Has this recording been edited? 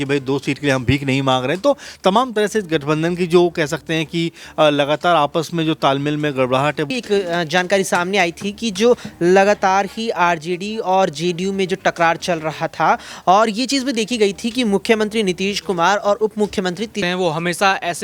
yes; 2 cuts; at 6.9 s, 17.0 s

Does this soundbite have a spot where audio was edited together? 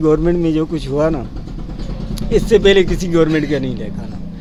no; 0 cuts

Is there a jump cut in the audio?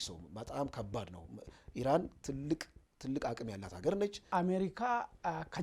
yes; 1 cut; at 4.2 s

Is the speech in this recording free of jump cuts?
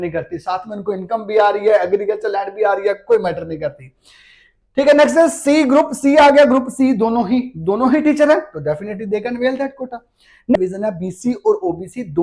no; 1 cut; at 10.5 s

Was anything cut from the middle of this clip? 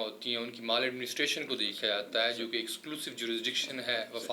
no; 0 cuts

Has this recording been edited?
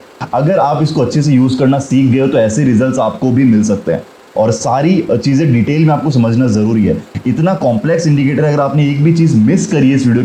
no; 0 cuts

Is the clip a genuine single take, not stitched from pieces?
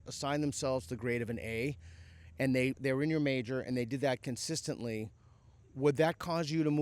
no; 1 cut; at 2.8 s

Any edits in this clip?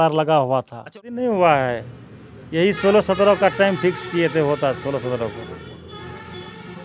yes; 1 cut; at 1.0 s

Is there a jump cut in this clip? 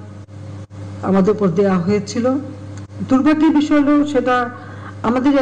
no; 0 cuts

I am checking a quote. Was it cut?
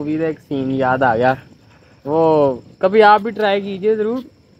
no; 0 cuts

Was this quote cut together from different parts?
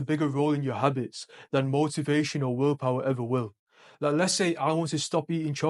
no; 0 cuts

